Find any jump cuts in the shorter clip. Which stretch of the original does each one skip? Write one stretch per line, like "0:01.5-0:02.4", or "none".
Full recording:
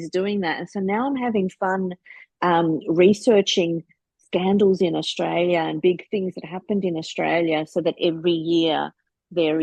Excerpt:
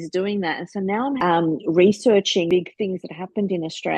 0:01.2-0:02.4
0:03.7-0:05.8